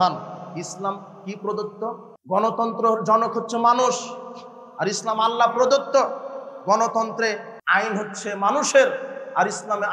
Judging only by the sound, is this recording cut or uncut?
cut